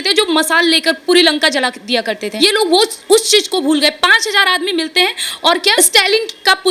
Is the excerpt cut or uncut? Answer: cut